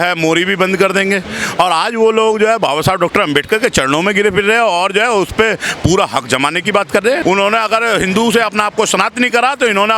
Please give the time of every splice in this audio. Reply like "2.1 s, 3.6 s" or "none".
7.2 s